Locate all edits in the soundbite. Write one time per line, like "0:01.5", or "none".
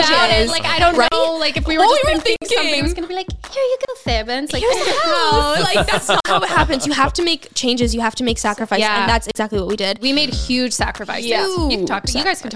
none